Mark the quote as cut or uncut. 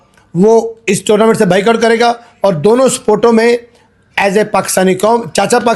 uncut